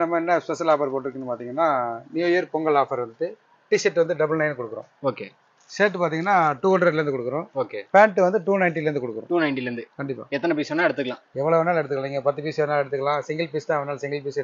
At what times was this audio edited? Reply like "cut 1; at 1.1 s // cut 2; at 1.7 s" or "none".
none